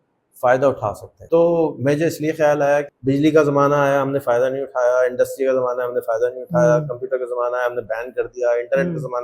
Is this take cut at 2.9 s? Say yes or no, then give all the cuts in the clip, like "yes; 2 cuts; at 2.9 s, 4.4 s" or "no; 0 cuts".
yes; 2 cuts; at 1.1 s, 2.9 s